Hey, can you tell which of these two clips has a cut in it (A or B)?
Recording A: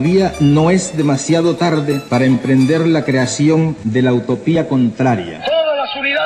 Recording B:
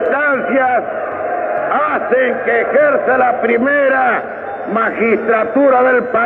A